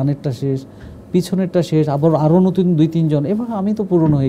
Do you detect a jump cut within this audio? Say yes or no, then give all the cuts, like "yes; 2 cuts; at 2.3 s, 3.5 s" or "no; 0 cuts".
no; 0 cuts